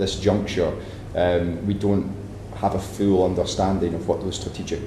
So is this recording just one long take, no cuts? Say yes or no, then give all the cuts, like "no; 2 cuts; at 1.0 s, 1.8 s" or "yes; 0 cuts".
yes; 0 cuts